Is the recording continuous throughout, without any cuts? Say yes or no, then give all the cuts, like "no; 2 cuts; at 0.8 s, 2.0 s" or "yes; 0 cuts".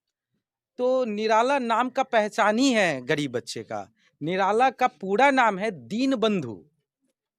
yes; 0 cuts